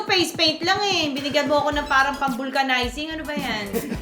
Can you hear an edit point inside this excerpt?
no; 0 cuts

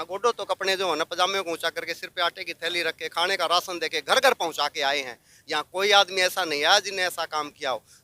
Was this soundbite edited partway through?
no; 0 cuts

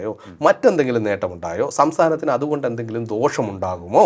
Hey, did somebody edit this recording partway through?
no; 0 cuts

